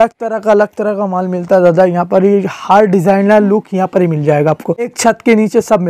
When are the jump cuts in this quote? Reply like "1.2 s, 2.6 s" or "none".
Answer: 4.9 s